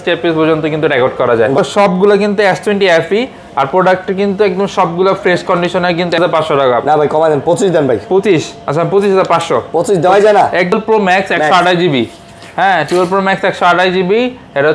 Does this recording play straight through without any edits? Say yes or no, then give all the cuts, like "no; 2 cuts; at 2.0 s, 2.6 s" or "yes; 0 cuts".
no; 3 cuts; at 1.6 s, 6.2 s, 10.7 s